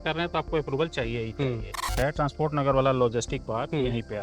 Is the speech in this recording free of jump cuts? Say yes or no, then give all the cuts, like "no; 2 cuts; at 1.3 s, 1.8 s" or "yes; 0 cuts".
no; 1 cut; at 1.9 s